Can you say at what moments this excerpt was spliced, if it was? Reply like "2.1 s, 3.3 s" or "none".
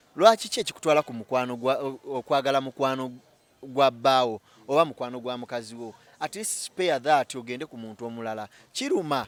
none